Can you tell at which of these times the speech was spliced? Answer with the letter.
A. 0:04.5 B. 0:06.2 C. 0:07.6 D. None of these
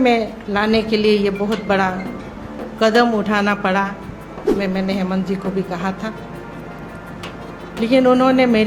A